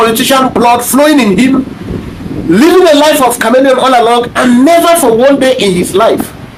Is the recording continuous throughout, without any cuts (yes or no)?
yes